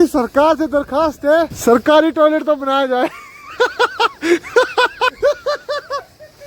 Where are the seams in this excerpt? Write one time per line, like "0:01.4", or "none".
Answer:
0:01.5
0:05.1